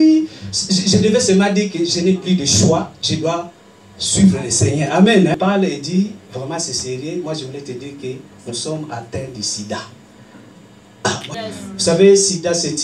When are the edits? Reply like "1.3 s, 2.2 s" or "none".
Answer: 5.3 s, 11.4 s